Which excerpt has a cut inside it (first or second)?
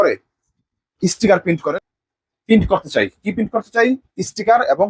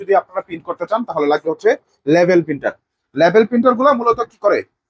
first